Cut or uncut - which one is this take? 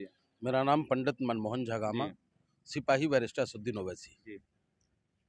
uncut